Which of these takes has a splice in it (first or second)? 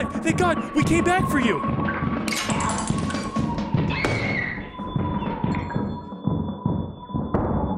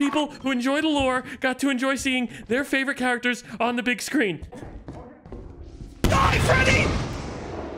second